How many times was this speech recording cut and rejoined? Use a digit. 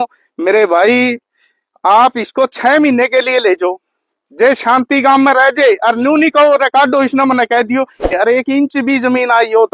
1